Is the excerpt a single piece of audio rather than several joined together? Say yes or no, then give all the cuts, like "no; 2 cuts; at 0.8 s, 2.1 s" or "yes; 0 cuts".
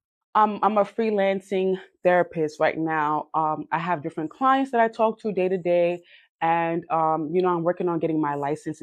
yes; 0 cuts